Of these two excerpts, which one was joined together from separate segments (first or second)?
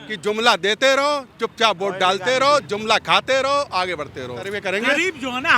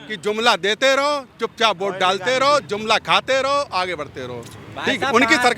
first